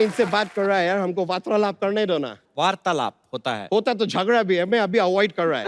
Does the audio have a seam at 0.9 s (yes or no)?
no